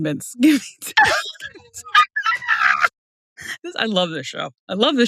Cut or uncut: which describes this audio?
uncut